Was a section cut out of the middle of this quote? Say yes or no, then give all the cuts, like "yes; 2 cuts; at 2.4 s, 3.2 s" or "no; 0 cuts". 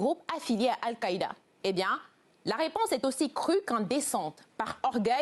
yes; 1 cut; at 1.4 s